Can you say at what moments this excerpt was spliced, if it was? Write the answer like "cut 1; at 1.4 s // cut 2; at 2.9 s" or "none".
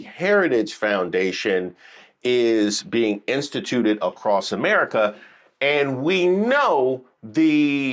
none